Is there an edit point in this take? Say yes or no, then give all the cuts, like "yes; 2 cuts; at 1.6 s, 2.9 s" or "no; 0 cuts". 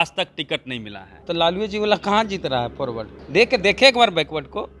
yes; 1 cut; at 1.1 s